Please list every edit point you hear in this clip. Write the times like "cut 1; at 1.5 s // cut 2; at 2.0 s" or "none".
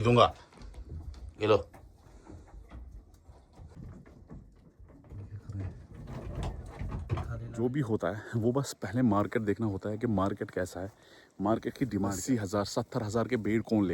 cut 1; at 3.7 s // cut 2; at 7.4 s // cut 3; at 12.2 s